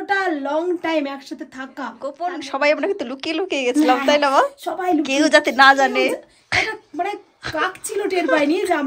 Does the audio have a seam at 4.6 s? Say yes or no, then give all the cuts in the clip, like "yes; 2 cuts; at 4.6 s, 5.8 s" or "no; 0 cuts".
no; 1 cut; at 2.1 s